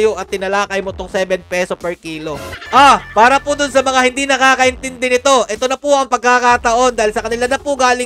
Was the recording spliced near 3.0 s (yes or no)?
yes